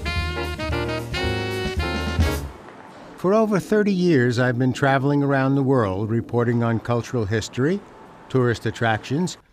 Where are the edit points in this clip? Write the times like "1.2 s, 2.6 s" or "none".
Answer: 0.9 s